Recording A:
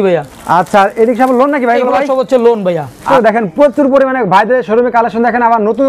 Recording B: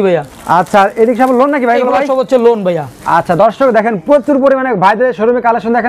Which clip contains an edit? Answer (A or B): A